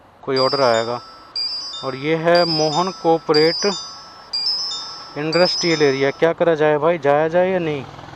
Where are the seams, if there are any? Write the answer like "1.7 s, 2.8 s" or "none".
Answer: none